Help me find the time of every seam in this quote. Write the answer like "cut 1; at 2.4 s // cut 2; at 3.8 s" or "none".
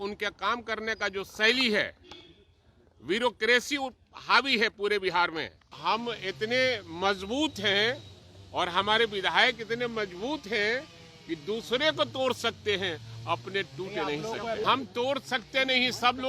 cut 1; at 5.6 s // cut 2; at 14.6 s

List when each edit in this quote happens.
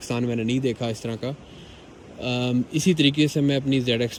none

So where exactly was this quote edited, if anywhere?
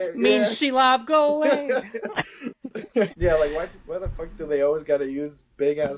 cut 1; at 3.1 s

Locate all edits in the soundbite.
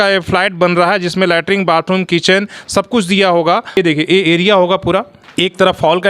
cut 1; at 3.7 s // cut 2; at 5.2 s

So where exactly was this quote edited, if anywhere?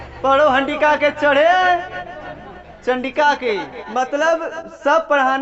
cut 1; at 3.8 s

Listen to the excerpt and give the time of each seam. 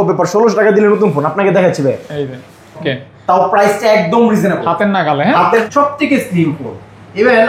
cut 1; at 2.8 s // cut 2; at 5.6 s

